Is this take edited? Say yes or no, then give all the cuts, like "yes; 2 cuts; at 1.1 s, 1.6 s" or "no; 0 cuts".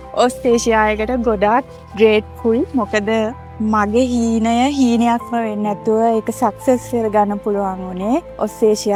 no; 0 cuts